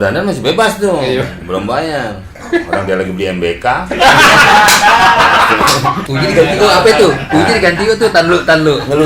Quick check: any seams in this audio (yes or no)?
yes